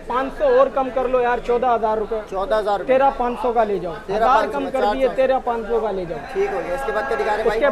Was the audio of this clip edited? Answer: no; 0 cuts

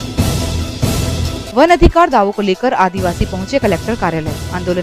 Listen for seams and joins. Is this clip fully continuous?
yes; 0 cuts

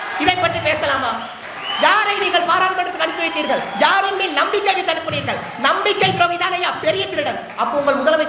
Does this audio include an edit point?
no; 0 cuts

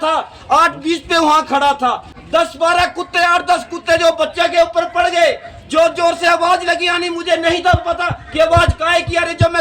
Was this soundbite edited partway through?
yes; 1 cut; at 2.1 s

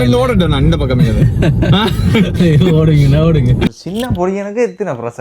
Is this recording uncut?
no; 1 cut; at 3.7 s

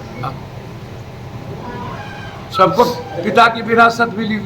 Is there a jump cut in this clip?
yes; 1 cut; at 2.1 s

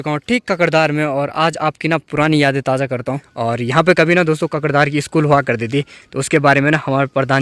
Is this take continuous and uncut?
yes; 0 cuts

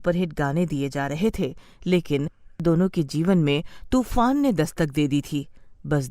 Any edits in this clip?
yes; 1 cut; at 2.4 s

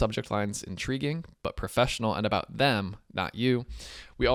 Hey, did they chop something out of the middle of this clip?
no; 0 cuts

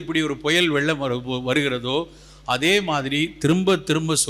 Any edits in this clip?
no; 0 cuts

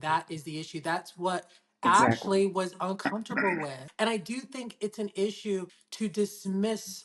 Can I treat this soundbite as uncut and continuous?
no; 2 cuts; at 3.8 s, 5.8 s

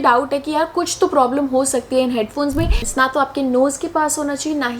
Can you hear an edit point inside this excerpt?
yes; 1 cut; at 2.8 s

